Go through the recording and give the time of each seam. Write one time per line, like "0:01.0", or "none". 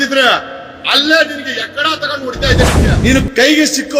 0:02.7

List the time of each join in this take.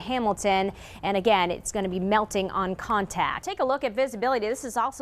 0:03.4

